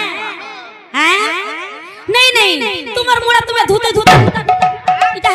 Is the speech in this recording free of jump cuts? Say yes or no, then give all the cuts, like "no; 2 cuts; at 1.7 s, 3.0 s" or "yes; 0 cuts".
yes; 0 cuts